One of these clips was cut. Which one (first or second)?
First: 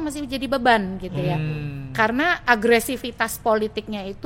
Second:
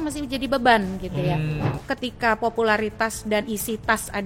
second